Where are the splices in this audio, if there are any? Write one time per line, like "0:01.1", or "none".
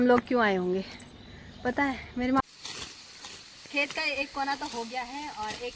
0:02.4